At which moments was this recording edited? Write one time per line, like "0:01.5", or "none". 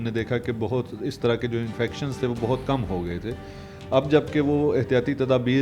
none